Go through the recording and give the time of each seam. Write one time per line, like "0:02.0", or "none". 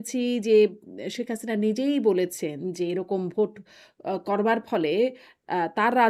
none